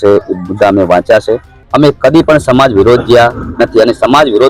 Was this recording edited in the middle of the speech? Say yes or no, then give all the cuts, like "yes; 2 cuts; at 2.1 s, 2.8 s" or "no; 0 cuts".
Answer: yes; 1 cut; at 1.5 s